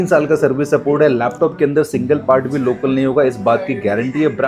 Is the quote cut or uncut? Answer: uncut